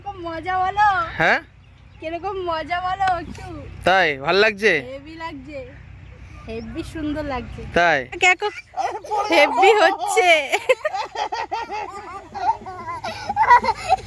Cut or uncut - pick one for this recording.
cut